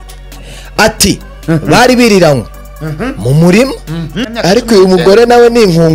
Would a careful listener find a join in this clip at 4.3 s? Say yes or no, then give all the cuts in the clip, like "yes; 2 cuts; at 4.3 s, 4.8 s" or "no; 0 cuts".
yes; 1 cut; at 4.3 s